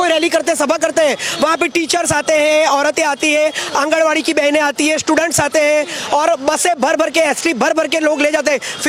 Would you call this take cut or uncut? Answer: uncut